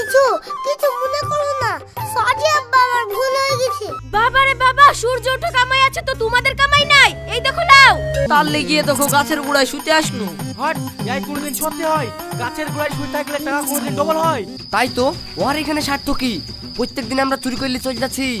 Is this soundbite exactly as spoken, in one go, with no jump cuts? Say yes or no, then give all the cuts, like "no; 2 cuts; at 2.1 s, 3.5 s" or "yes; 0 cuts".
no; 3 cuts; at 3.9 s, 8.3 s, 14.5 s